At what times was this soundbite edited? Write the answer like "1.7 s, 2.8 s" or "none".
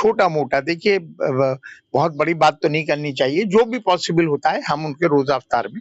none